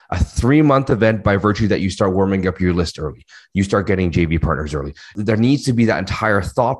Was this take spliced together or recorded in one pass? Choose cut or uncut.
cut